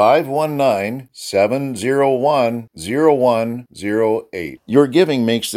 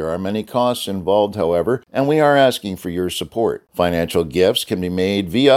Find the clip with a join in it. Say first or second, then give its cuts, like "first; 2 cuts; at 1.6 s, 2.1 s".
second; 1 cut; at 1.9 s